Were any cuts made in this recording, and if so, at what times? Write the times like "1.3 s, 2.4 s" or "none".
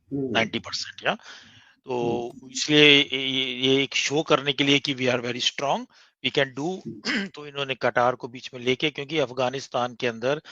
none